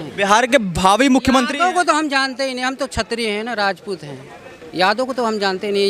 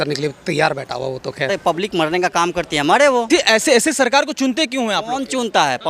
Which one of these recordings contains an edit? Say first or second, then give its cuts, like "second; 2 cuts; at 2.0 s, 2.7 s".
second; 2 cuts; at 1.5 s, 3.3 s